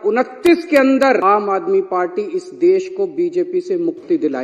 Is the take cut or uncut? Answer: cut